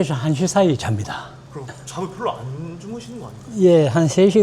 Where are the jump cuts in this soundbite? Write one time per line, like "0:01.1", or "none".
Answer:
0:01.4

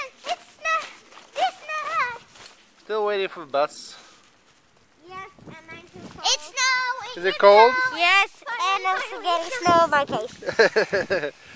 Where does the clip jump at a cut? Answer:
none

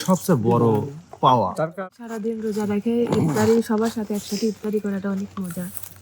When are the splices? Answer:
0:01.7

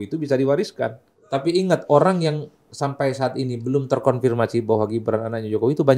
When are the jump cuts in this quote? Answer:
0:01.2

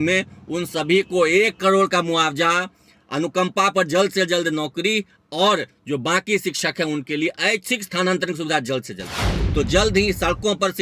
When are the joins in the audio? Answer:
0:09.4

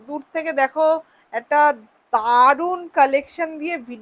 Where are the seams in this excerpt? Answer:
none

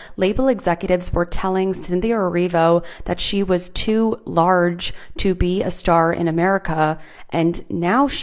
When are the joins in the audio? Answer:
none

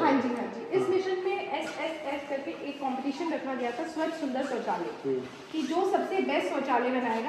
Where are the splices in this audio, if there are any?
none

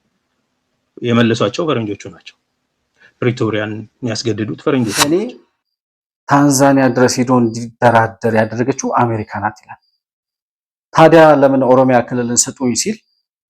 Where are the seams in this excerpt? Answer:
0:05.0

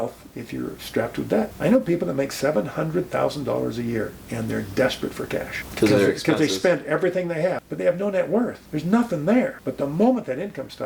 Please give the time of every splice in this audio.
0:01.5
0:05.6
0:07.7
0:08.6
0:09.6

